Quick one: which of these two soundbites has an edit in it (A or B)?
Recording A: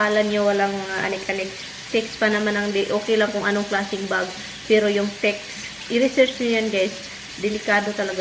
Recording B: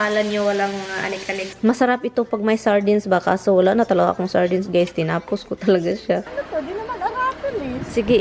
B